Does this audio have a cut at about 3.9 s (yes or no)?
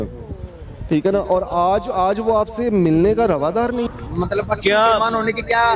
yes